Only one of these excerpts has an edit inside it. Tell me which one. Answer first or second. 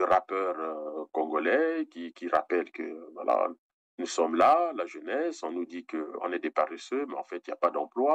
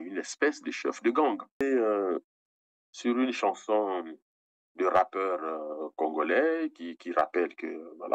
second